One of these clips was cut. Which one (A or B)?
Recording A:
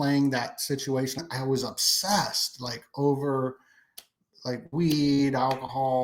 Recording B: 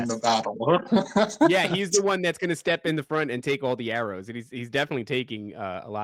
A